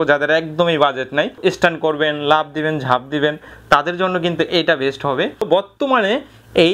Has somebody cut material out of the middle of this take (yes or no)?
yes